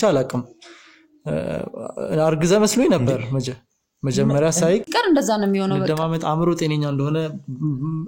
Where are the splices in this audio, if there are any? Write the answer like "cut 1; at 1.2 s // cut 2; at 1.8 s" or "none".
cut 1; at 4.9 s